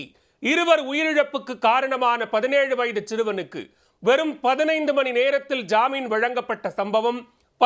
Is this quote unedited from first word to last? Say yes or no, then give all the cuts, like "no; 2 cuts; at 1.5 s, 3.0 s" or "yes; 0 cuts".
yes; 0 cuts